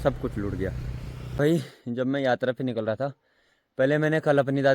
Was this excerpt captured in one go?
no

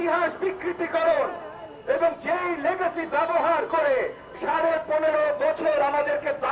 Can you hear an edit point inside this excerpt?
no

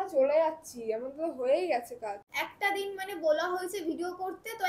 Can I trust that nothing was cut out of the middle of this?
no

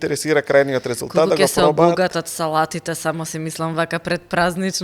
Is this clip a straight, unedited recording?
yes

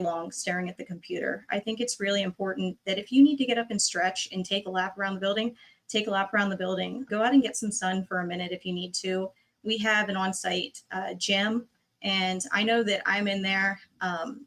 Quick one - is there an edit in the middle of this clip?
yes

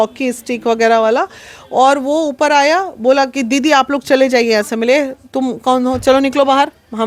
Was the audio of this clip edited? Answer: no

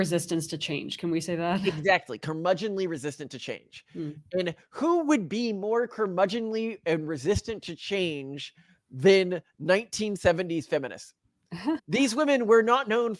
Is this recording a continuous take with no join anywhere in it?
yes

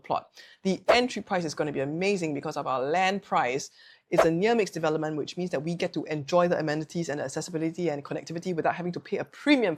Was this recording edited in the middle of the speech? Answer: no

